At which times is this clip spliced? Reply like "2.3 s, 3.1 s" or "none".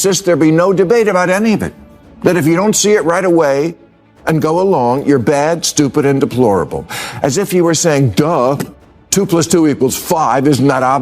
2.1 s